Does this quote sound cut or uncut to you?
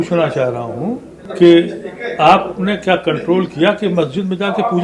cut